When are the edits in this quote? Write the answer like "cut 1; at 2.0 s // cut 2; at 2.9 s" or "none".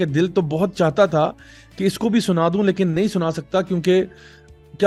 none

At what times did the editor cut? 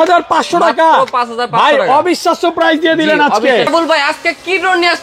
cut 1; at 3.7 s

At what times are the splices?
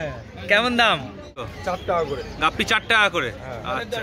cut 1; at 1.5 s

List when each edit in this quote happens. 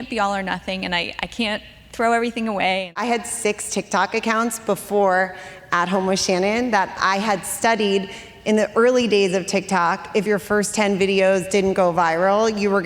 cut 1; at 2.9 s

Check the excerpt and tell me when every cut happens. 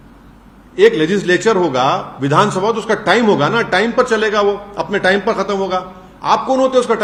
none

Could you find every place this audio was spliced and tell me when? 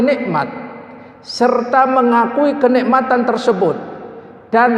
none

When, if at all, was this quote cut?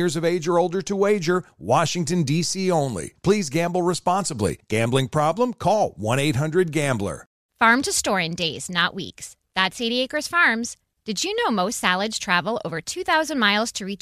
cut 1; at 7.4 s

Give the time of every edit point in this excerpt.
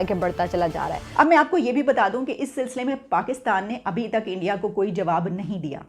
cut 1; at 1.0 s

